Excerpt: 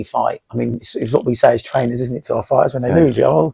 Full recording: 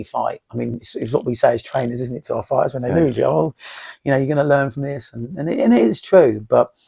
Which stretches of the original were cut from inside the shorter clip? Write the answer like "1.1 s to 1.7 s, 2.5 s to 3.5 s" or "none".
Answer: none